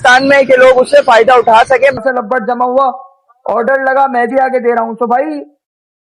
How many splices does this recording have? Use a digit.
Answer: 1